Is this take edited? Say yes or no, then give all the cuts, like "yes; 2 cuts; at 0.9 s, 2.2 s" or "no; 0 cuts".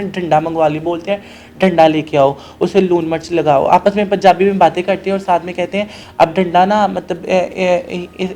no; 0 cuts